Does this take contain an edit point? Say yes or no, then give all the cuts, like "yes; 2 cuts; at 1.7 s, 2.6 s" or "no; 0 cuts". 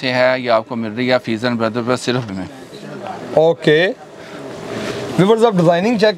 yes; 2 cuts; at 2.2 s, 5.1 s